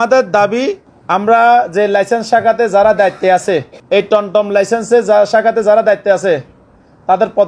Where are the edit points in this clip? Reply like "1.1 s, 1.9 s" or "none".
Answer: 0.9 s, 3.7 s